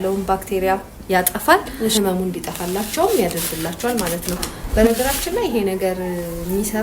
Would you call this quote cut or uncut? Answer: cut